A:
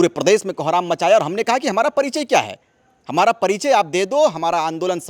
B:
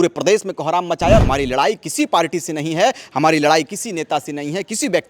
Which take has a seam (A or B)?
B